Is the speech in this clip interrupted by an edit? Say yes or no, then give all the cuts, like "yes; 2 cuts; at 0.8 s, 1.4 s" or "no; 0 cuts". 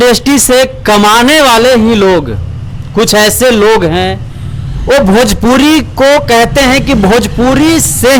no; 0 cuts